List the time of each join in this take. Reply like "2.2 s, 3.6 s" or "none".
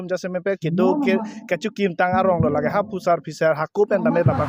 none